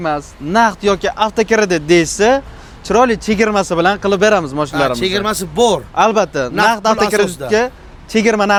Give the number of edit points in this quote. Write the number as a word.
zero